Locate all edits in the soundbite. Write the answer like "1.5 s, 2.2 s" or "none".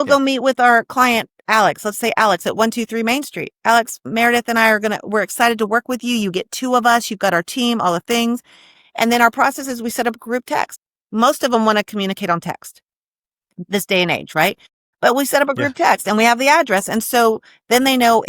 10.7 s